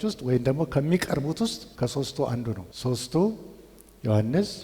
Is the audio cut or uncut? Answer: cut